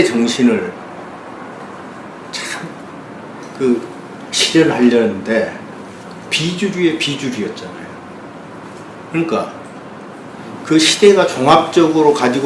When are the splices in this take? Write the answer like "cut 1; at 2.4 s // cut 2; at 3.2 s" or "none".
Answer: cut 1; at 5.0 s